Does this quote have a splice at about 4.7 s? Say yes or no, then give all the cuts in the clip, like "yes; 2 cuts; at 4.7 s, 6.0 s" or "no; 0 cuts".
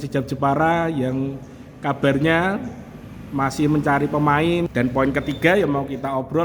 yes; 1 cut; at 4.7 s